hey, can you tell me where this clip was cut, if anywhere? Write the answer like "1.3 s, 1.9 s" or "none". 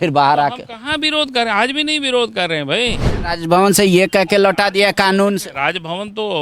3.1 s

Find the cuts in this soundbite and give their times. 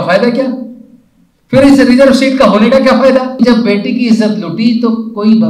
3.4 s

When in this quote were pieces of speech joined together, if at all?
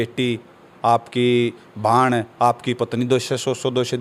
none

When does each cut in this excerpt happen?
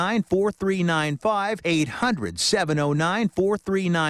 1.6 s

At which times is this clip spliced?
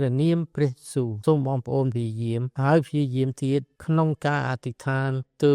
1.1 s, 2.5 s, 3.7 s

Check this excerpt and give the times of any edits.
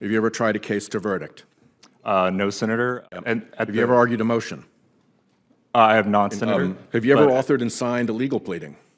3.1 s, 6.7 s

